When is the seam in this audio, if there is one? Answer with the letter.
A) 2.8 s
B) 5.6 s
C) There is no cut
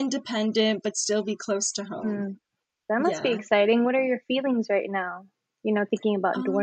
A